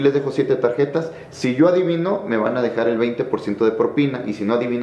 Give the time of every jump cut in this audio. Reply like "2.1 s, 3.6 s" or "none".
none